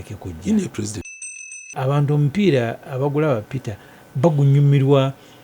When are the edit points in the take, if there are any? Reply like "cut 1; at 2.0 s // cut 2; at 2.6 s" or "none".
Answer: cut 1; at 1.0 s